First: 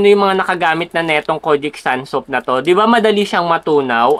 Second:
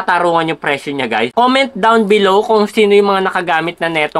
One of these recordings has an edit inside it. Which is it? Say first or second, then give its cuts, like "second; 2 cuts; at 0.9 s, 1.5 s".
second; 1 cut; at 1.3 s